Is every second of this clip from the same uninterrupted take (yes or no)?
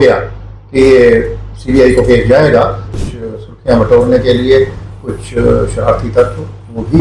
no